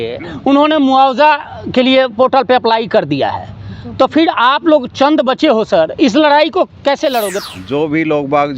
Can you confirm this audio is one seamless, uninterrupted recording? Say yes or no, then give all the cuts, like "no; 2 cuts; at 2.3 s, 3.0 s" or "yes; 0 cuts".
no; 1 cut; at 7.4 s